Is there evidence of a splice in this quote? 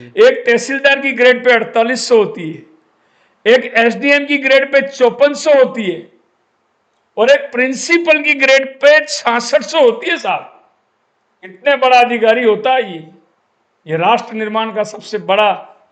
no; 0 cuts

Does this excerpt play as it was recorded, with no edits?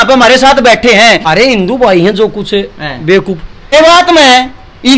no; 2 cuts; at 1.3 s, 3.7 s

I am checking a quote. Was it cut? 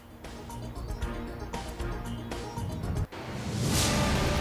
no; 0 cuts

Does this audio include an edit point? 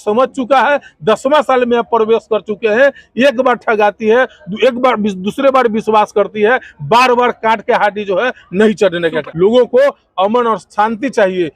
yes; 1 cut; at 9.2 s

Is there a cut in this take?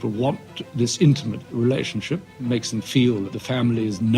yes; 2 cuts; at 1.4 s, 3.4 s

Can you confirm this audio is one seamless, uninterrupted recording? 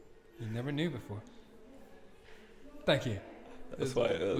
yes; 0 cuts

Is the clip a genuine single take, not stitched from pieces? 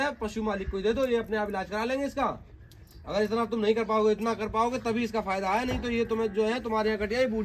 yes; 0 cuts

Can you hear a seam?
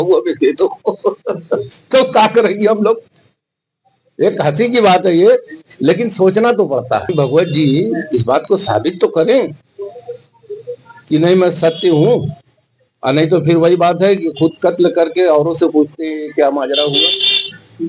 yes; 1 cut; at 7.1 s

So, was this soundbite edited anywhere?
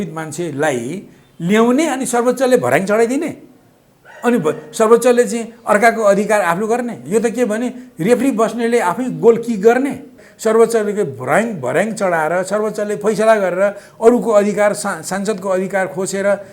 yes; 1 cut; at 10.2 s

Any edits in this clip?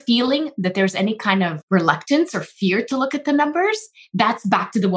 yes; 1 cut; at 1.6 s

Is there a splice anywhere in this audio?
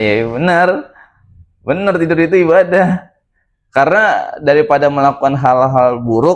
no; 0 cuts

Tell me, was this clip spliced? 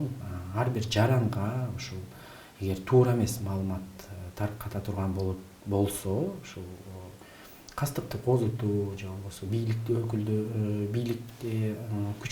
no; 0 cuts

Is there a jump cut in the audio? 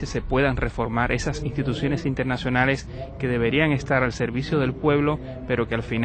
no; 0 cuts

